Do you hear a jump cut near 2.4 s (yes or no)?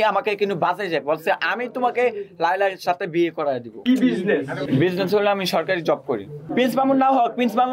no